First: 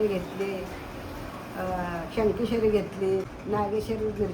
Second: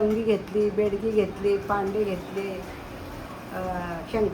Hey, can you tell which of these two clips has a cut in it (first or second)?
first